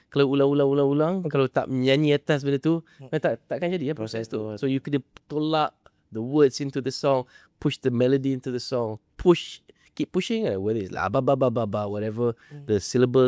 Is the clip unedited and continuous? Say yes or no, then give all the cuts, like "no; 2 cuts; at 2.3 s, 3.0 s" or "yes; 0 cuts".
yes; 0 cuts